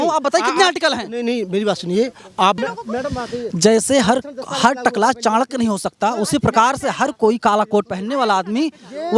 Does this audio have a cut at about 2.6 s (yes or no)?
yes